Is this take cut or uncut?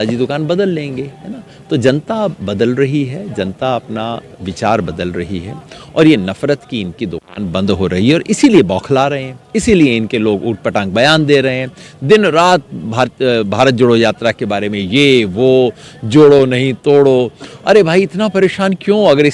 uncut